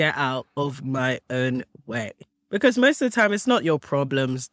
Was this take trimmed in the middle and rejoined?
no; 0 cuts

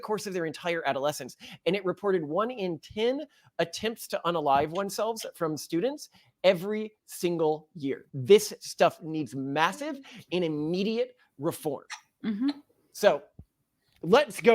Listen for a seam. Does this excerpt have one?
yes; 1 cut; at 8.0 s

